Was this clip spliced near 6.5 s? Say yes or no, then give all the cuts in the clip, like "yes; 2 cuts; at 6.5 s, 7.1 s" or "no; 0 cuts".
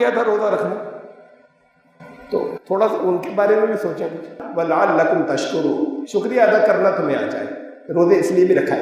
no; 1 cut; at 4.2 s